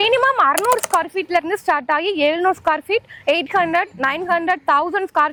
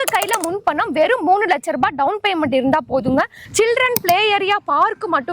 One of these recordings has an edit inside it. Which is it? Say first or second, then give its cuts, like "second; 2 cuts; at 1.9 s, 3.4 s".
second; 1 cut; at 3.4 s